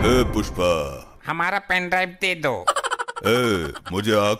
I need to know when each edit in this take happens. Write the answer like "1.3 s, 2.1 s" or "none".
1.1 s